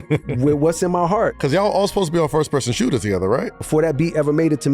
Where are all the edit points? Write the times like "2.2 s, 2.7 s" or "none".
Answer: 1.4 s, 3.5 s